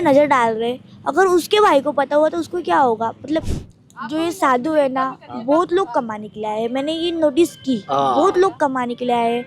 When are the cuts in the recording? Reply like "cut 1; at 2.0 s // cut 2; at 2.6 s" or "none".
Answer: cut 1; at 3.5 s